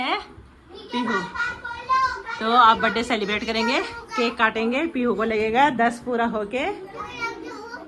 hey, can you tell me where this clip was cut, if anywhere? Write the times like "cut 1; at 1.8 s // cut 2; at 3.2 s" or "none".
none